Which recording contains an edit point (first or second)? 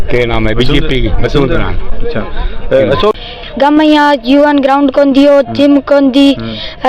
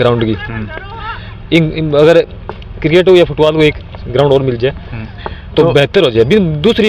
first